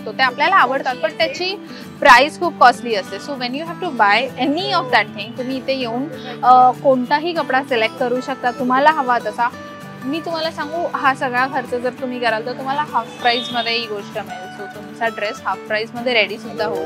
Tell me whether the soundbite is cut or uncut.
uncut